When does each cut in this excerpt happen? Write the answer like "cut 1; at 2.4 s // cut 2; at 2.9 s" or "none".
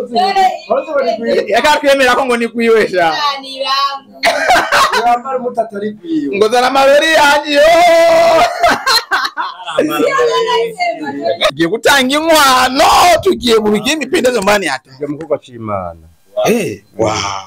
cut 1; at 11.5 s